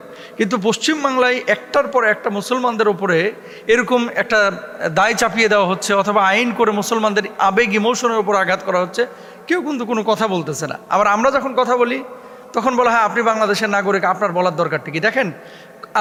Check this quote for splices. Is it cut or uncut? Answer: uncut